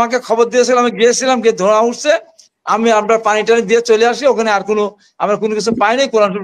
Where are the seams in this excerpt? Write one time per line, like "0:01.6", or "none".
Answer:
none